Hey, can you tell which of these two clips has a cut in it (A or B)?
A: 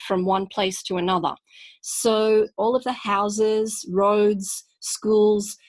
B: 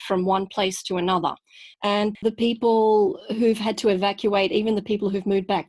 B